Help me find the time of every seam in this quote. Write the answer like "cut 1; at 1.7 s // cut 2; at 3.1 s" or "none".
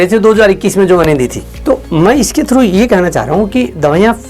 none